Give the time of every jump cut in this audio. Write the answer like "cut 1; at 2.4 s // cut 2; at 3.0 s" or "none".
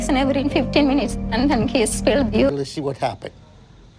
cut 1; at 2.5 s